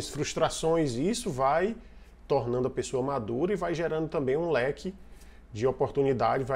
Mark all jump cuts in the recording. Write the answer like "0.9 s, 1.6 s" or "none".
none

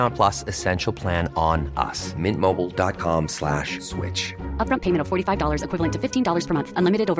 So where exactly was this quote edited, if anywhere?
none

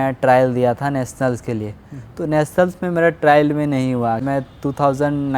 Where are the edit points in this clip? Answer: 4.3 s

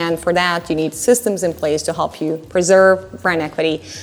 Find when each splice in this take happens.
none

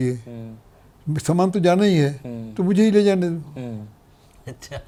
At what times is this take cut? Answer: none

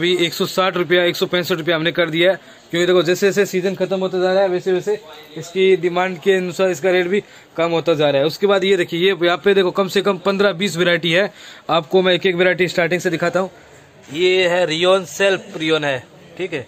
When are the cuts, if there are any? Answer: none

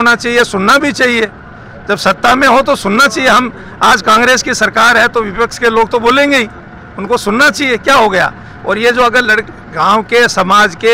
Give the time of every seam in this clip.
none

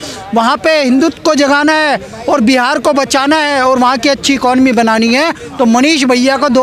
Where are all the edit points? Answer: none

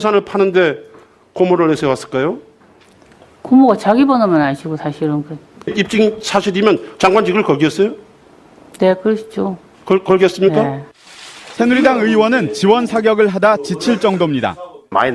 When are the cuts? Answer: 5.2 s

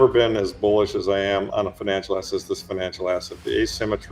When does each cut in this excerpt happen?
1.5 s

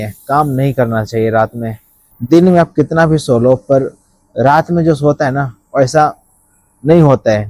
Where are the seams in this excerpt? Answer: 2.1 s

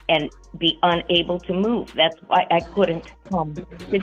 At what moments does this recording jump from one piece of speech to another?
3.1 s

